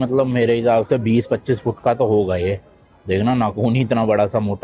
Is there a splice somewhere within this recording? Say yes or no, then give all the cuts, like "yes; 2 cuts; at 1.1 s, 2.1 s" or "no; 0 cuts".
no; 0 cuts